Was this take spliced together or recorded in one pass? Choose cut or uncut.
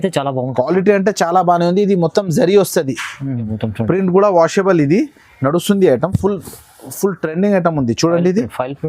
cut